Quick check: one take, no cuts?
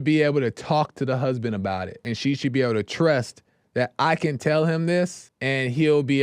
yes; 0 cuts

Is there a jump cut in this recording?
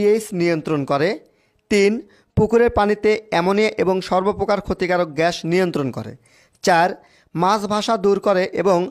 no; 0 cuts

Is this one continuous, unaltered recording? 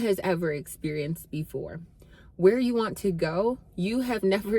yes; 0 cuts

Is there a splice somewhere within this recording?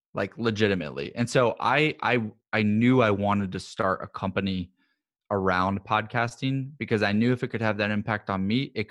no; 0 cuts

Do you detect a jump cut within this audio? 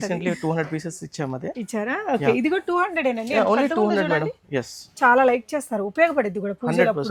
no; 0 cuts

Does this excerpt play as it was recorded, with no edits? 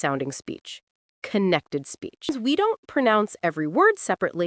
no; 1 cut; at 2.3 s

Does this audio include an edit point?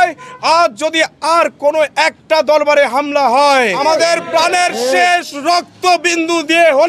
yes; 1 cut; at 3.8 s

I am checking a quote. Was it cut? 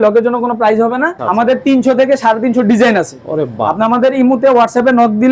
yes; 1 cut; at 1.5 s

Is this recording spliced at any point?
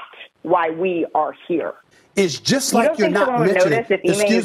yes; 1 cut; at 1.9 s

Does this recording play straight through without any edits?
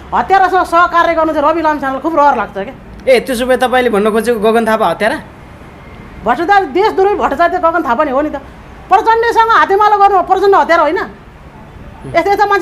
yes; 0 cuts

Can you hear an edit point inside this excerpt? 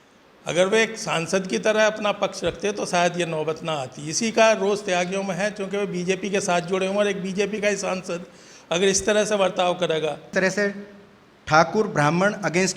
yes; 1 cut; at 10.3 s

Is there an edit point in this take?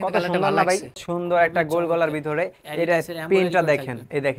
yes; 1 cut; at 1.0 s

